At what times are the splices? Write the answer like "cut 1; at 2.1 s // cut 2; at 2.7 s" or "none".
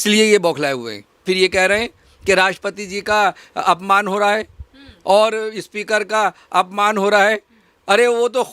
cut 1; at 1.2 s